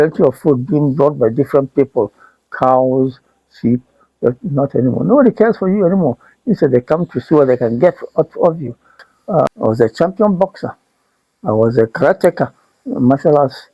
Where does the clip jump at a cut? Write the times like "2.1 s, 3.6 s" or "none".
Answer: 9.5 s